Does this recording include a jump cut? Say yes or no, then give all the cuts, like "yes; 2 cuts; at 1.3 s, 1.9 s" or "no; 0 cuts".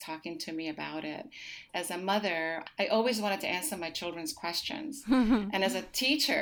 yes; 2 cuts; at 1.7 s, 2.6 s